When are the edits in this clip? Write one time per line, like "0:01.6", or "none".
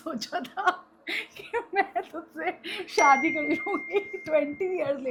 none